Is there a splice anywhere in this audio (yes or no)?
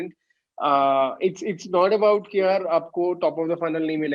no